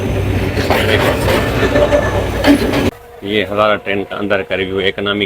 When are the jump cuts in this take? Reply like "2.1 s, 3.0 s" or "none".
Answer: 2.9 s